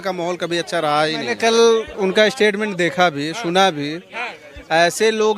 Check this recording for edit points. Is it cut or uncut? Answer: cut